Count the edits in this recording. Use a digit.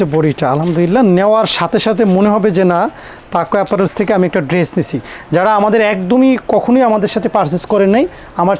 0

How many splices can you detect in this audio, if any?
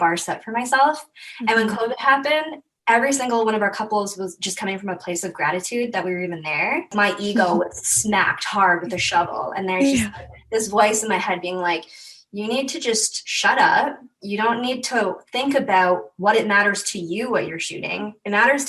1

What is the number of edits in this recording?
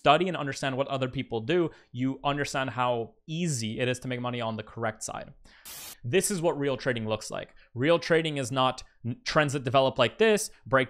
1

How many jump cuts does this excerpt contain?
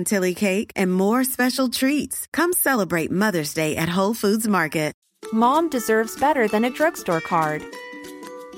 1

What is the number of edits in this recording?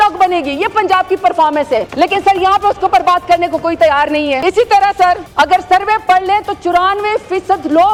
0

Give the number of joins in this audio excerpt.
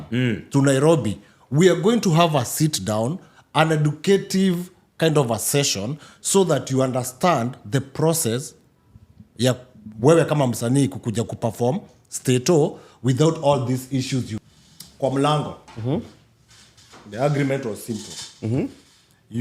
1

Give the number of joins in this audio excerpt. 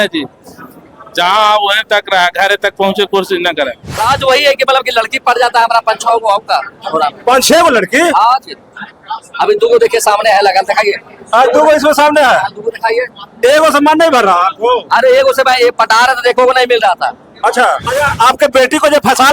2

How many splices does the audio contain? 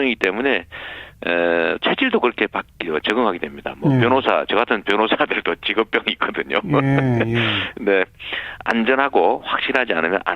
1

